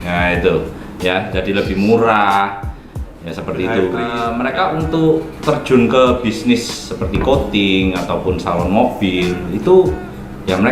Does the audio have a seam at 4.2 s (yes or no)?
yes